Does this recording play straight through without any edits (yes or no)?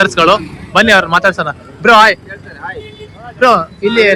yes